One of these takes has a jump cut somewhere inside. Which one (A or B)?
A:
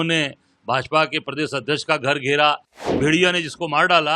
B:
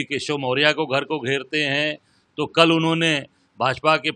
A